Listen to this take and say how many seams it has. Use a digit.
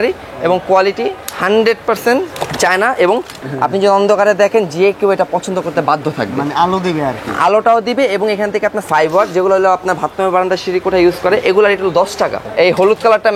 3